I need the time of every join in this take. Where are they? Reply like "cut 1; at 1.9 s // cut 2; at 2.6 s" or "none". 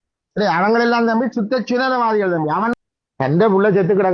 cut 1; at 2.7 s